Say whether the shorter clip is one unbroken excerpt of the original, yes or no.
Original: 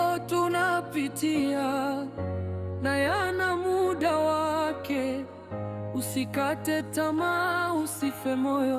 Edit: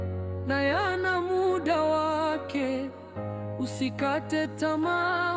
yes